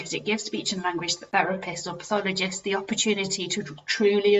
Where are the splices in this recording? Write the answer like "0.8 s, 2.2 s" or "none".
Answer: 1.3 s